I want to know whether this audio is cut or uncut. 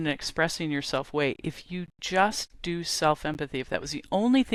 uncut